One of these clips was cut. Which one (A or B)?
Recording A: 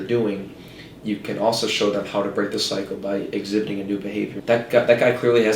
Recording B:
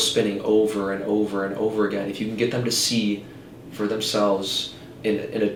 A